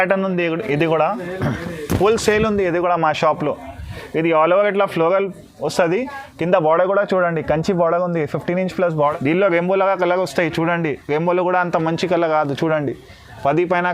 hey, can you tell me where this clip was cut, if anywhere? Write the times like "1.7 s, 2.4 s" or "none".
8.9 s